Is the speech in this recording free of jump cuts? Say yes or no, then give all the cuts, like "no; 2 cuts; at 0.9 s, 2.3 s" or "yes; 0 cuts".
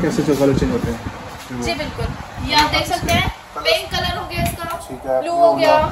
yes; 0 cuts